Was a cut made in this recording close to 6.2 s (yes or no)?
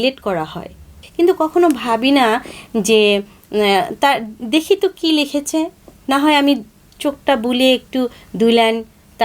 no